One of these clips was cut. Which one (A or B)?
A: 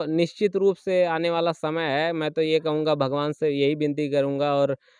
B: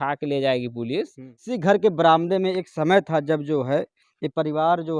B